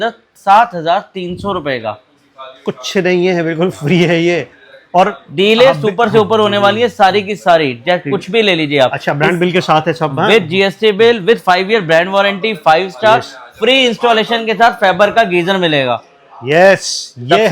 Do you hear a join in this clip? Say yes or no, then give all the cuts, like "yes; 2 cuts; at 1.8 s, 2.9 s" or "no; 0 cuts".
no; 0 cuts